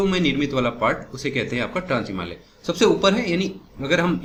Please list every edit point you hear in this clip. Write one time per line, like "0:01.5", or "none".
none